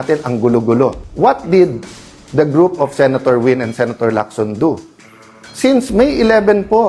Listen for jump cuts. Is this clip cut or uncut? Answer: cut